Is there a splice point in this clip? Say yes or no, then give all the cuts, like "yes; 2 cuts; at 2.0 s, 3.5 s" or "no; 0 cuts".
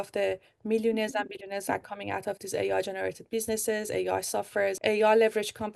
yes; 1 cut; at 4.8 s